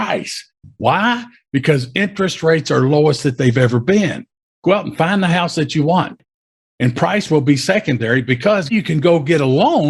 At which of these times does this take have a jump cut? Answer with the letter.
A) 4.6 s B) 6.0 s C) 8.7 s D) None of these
C